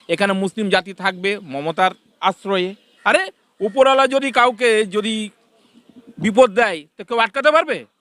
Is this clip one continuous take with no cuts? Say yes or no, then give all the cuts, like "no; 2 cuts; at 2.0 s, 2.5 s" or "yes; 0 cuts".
yes; 0 cuts